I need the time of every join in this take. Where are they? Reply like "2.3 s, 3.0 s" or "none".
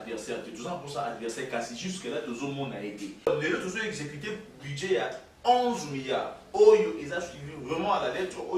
3.3 s